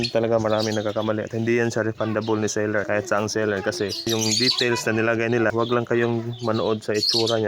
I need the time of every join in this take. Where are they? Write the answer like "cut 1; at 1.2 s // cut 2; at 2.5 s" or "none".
cut 1; at 2.8 s // cut 2; at 4.1 s // cut 3; at 5.5 s